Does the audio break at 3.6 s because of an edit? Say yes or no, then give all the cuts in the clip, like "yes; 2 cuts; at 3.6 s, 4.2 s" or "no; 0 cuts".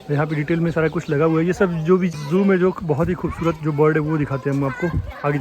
no; 1 cut; at 2.1 s